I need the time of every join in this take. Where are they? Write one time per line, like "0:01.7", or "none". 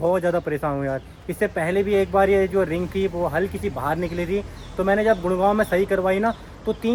none